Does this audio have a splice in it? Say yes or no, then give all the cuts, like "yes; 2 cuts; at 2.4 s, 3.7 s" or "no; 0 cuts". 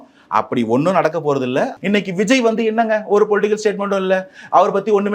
yes; 1 cut; at 1.7 s